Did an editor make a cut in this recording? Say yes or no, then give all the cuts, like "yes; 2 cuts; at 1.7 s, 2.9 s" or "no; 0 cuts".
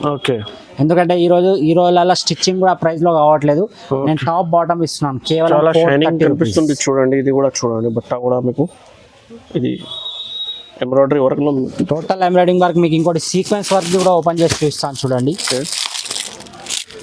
no; 0 cuts